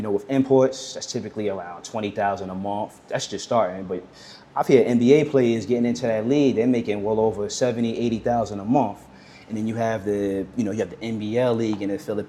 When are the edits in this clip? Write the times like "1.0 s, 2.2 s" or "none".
none